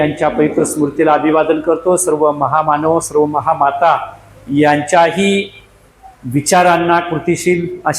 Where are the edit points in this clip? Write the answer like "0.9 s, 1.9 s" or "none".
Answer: none